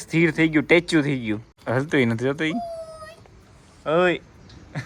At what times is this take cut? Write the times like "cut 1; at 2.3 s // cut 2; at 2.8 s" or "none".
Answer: cut 1; at 1.5 s